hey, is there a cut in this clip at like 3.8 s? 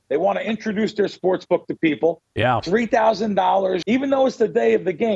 yes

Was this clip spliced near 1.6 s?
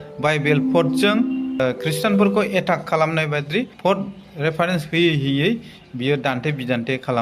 yes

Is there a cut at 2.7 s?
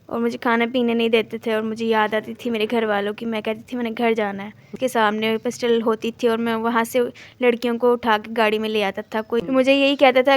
no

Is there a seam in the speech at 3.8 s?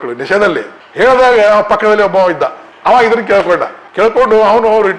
no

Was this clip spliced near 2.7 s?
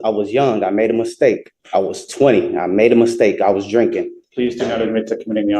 no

